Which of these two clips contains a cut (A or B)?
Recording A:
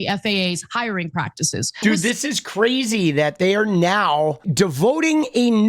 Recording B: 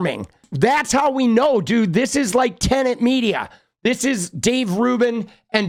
A